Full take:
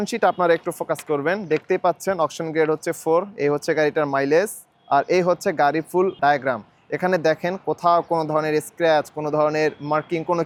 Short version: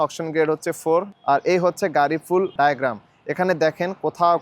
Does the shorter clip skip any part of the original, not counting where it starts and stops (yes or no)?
yes